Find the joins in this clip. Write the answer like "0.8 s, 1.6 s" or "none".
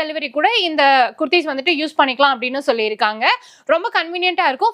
none

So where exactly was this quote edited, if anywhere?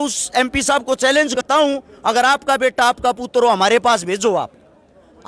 1.4 s

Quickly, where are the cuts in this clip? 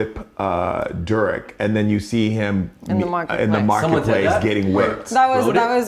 none

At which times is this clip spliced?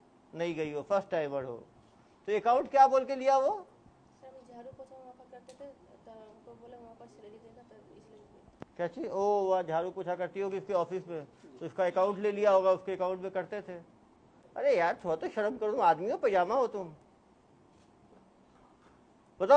none

